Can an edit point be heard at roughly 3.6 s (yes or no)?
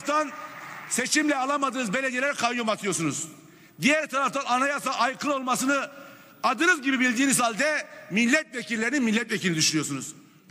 no